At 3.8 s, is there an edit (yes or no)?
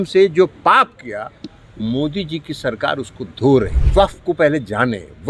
yes